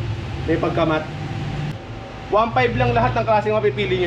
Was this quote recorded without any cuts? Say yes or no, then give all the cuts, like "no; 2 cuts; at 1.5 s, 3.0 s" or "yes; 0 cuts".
no; 1 cut; at 1.7 s